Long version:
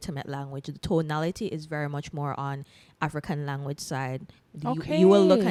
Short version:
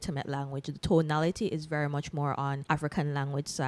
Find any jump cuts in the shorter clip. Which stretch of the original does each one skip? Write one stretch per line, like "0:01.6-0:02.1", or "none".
0:02.6-0:02.9

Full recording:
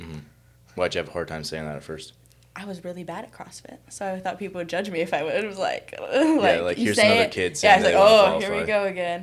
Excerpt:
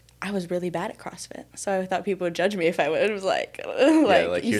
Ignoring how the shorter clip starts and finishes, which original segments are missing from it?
none

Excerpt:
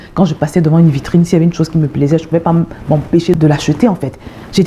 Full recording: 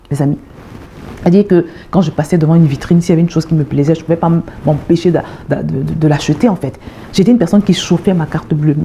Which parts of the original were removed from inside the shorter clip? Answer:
0:05.1-0:06.0

